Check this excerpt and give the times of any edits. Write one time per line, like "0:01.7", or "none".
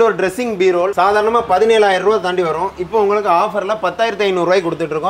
0:00.9